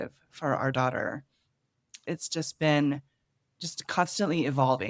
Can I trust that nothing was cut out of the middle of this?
yes; 0 cuts

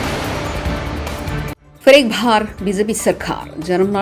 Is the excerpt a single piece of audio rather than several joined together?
no; 1 cut; at 1.7 s

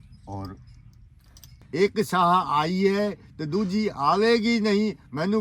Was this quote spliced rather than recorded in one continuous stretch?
yes; 1 cut; at 1.5 s

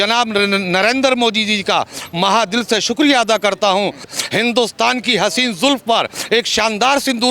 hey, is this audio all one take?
no; 1 cut; at 4.1 s

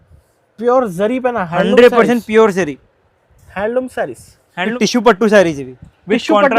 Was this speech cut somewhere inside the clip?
yes; 1 cut; at 4.7 s

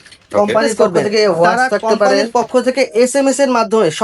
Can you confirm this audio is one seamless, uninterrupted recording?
no; 1 cut; at 2.3 s

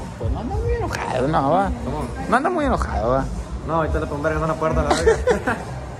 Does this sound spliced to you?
no; 0 cuts

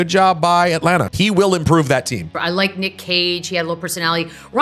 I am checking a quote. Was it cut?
yes; 2 cuts; at 1.1 s, 2.3 s

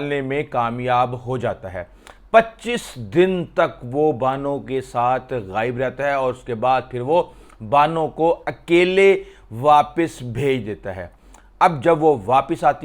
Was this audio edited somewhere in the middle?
no; 0 cuts

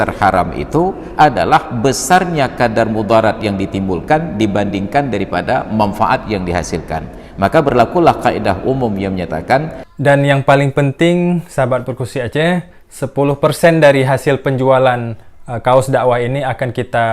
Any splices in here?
yes; 1 cut; at 9.8 s

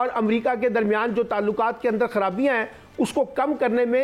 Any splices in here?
no; 0 cuts

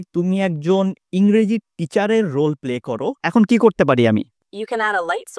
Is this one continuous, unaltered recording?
no; 1 cut; at 3.2 s

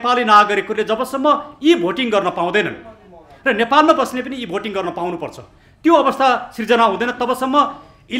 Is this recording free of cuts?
yes; 0 cuts

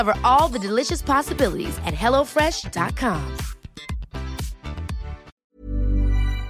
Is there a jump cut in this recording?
yes; 1 cut; at 5.3 s

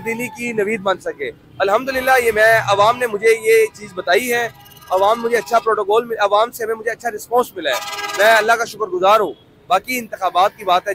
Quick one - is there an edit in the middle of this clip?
no; 0 cuts

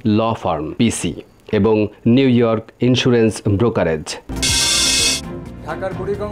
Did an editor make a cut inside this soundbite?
yes; 1 cut; at 4.2 s

